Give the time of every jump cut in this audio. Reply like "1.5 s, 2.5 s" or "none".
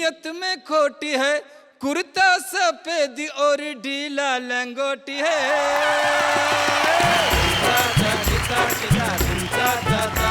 7.4 s